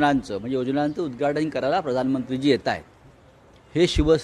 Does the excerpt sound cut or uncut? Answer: uncut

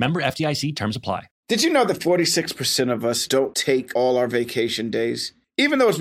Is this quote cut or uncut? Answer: cut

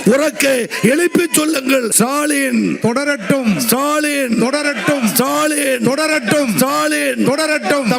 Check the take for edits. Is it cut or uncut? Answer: cut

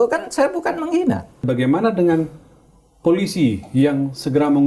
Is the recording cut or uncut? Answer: cut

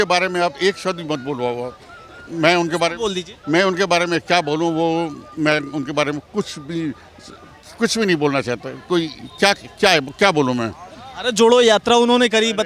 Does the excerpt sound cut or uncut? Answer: uncut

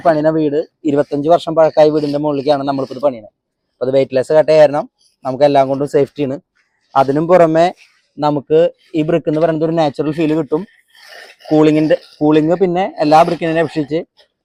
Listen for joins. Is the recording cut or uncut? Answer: uncut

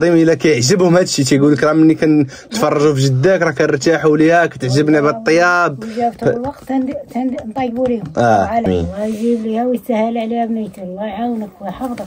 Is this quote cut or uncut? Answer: cut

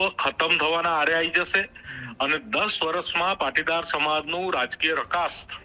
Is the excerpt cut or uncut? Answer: uncut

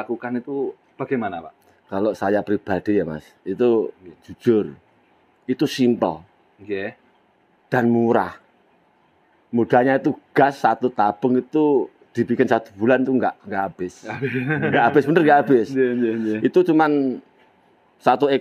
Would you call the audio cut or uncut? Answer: uncut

